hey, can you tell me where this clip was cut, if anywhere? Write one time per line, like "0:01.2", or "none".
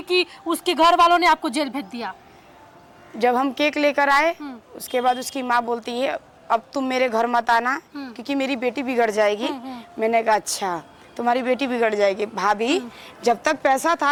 none